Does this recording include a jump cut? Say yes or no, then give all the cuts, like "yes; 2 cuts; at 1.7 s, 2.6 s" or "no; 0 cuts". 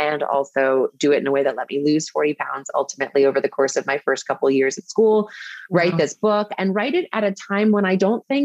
no; 0 cuts